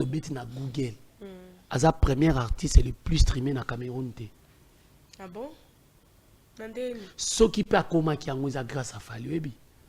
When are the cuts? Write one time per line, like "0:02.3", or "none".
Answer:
none

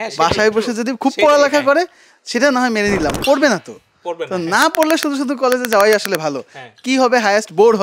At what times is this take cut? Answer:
none

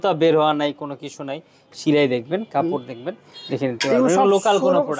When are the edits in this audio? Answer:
none

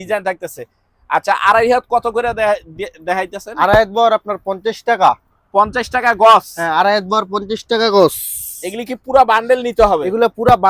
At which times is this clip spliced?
none

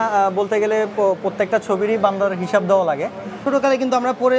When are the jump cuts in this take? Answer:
0:03.4

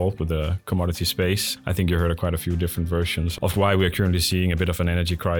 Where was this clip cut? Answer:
none

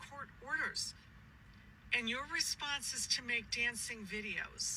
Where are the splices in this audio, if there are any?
none

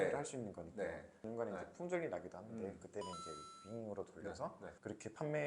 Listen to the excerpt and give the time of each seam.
0:01.2

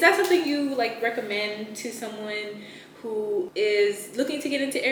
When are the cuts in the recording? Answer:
none

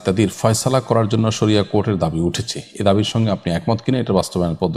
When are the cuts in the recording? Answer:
none

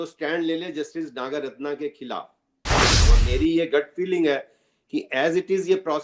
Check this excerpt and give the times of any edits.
0:02.9

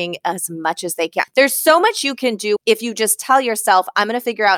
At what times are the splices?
0:01.3
0:02.6

